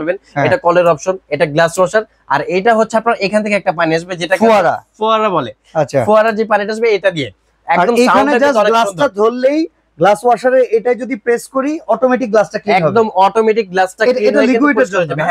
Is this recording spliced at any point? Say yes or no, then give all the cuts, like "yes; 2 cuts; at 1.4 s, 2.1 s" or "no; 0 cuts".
no; 0 cuts